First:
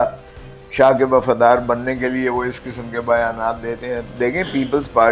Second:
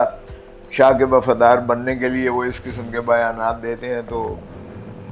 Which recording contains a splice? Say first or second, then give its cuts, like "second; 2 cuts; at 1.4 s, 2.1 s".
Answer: first; 1 cut; at 4.1 s